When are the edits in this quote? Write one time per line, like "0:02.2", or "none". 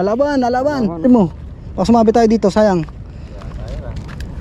0:01.0